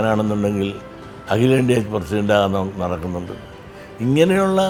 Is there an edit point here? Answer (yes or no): no